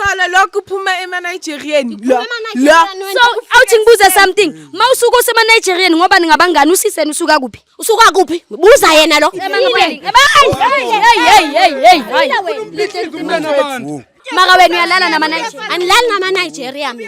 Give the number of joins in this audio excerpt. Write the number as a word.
two